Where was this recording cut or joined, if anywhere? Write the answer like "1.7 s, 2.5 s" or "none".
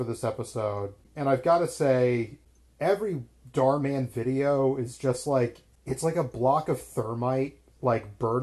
1.0 s, 2.4 s, 5.7 s